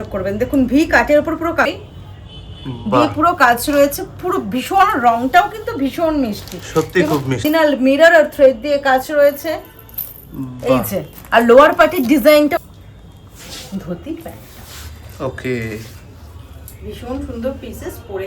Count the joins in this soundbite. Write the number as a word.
three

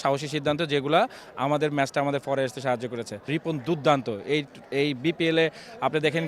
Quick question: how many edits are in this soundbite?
one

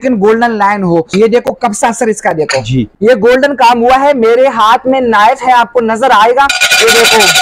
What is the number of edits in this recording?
two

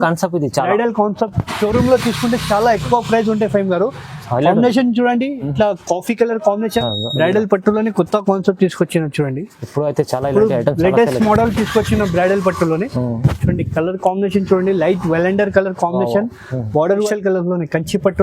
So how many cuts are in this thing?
two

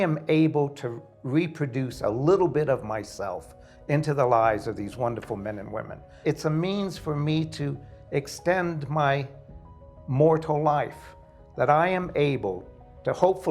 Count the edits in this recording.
one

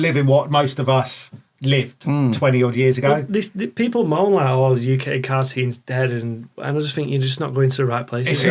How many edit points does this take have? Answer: zero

